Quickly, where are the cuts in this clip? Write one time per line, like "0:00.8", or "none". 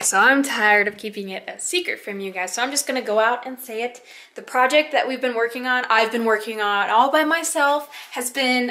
none